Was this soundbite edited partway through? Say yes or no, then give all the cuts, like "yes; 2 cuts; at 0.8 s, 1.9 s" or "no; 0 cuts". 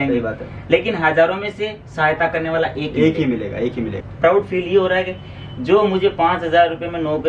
yes; 1 cut; at 4.0 s